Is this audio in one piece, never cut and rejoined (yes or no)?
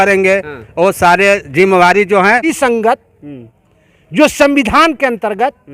no